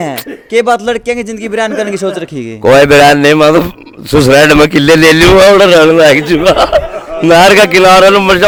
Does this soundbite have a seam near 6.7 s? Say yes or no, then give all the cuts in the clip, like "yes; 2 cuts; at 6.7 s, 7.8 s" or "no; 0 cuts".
no; 0 cuts